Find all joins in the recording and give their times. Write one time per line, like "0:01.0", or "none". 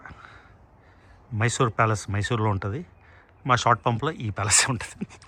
none